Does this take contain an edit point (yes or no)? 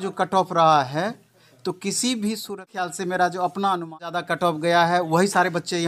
yes